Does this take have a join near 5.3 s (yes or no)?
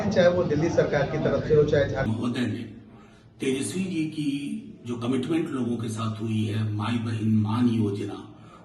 no